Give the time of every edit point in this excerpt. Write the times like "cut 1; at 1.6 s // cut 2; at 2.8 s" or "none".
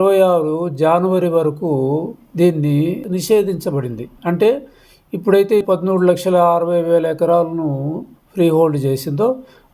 cut 1; at 5.6 s

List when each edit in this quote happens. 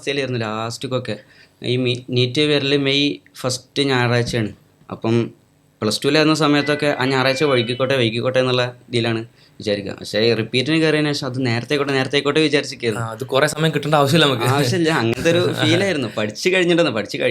none

